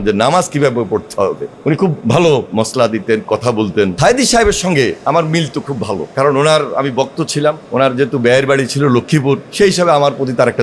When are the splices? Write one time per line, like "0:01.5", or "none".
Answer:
0:01.5
0:02.5
0:03.9
0:05.0
0:06.1
0:07.6
0:09.5